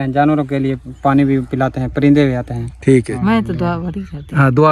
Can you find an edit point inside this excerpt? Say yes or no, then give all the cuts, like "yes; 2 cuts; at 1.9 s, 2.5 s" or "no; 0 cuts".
yes; 1 cut; at 3.1 s